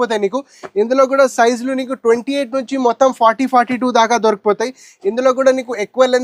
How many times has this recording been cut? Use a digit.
0